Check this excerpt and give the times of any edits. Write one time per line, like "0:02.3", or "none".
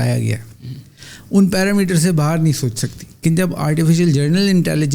0:03.2